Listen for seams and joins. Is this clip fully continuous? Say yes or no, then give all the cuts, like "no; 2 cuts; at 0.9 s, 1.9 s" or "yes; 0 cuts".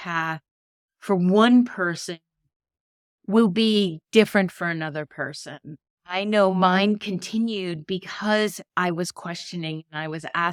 yes; 0 cuts